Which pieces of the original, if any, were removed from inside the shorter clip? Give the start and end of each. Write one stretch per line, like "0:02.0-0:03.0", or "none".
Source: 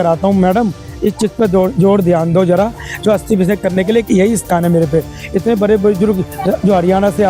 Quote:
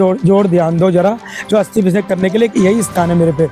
none